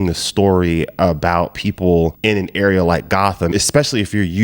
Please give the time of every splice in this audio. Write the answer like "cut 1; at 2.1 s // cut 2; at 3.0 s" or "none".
cut 1; at 3.5 s